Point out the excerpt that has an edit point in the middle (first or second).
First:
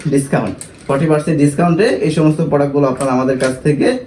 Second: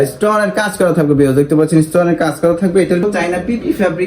second